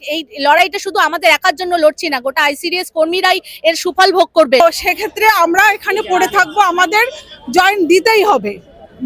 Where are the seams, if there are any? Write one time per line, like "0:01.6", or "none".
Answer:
0:04.6